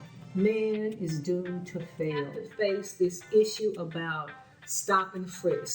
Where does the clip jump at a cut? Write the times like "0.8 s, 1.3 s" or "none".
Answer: 2.4 s